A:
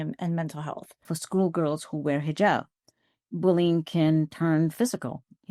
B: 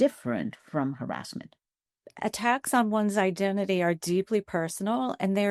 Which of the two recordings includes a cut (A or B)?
A